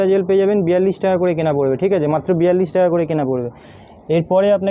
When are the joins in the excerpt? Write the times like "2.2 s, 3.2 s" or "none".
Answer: none